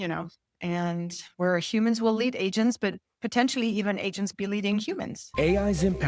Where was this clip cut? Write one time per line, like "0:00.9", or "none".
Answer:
0:05.2

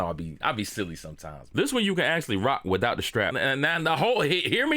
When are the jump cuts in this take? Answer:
0:01.5
0:03.3

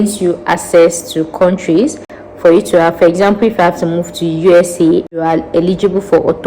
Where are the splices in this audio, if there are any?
0:05.2

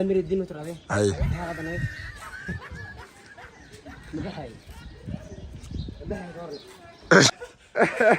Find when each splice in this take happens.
0:07.3

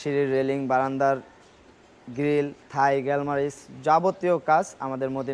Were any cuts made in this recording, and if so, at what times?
0:02.6

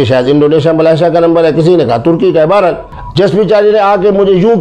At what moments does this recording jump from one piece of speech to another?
0:02.9

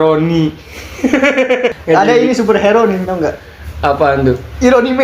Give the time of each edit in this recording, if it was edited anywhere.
0:01.7

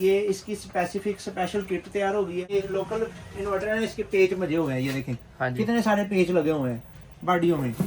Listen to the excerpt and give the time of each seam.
0:02.5

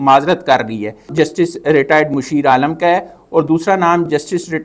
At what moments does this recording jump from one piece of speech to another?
0:01.1

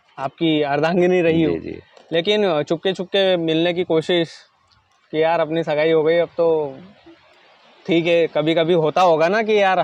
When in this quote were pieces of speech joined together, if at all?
none

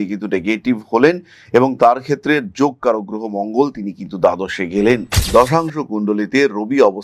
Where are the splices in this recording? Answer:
0:05.1

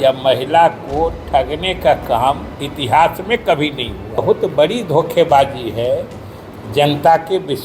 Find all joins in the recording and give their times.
0:04.2

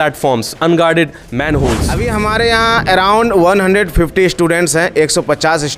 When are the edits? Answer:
0:02.0

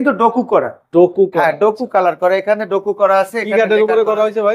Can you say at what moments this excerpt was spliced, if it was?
none

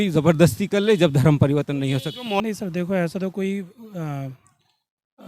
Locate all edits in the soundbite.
0:02.4

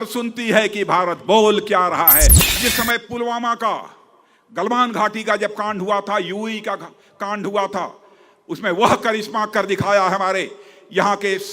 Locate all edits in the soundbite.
0:02.4

